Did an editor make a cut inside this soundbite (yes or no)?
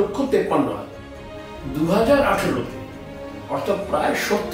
yes